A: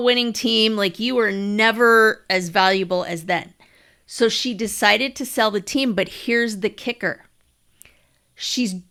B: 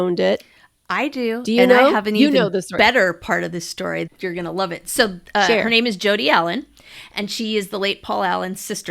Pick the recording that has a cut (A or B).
B